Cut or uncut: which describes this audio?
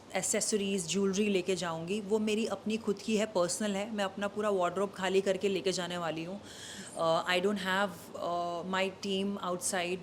uncut